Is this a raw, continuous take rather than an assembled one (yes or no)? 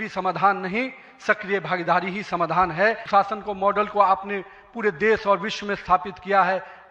no